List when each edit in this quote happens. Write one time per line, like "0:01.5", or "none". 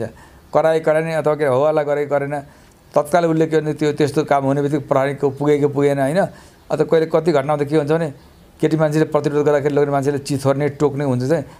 none